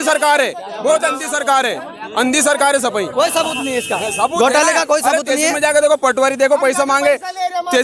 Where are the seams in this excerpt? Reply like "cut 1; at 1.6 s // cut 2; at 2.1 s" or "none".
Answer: none